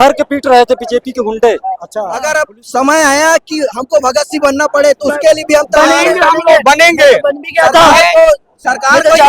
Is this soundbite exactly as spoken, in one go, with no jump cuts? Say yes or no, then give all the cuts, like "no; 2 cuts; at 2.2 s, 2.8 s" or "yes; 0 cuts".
no; 1 cut; at 2.2 s